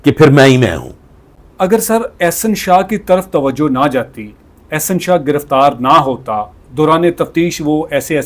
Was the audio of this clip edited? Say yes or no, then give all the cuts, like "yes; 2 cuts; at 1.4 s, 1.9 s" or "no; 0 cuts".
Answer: no; 0 cuts